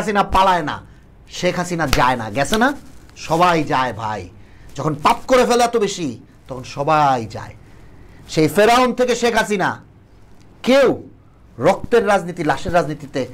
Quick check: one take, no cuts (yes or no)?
yes